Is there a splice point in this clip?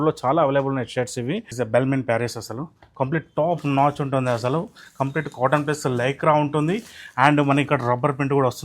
yes; 1 cut; at 1.5 s

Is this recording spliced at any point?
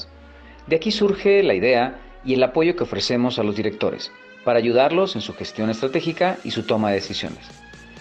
no; 0 cuts

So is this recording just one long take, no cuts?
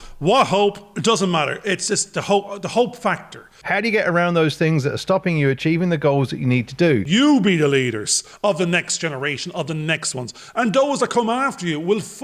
no; 2 cuts; at 3.4 s, 7.0 s

